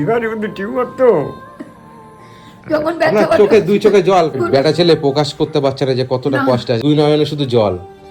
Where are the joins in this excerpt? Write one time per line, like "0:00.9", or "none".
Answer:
0:04.4
0:06.8